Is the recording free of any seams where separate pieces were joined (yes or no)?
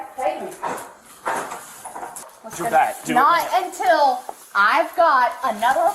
no